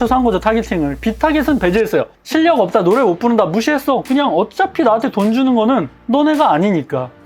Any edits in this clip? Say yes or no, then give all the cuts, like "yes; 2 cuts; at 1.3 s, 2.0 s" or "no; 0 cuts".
no; 0 cuts